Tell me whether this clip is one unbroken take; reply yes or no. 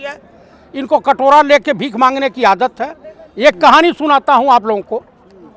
yes